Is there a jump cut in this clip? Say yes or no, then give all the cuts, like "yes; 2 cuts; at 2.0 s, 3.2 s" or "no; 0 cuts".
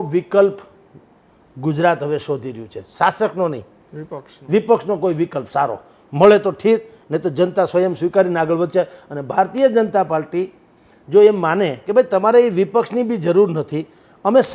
no; 0 cuts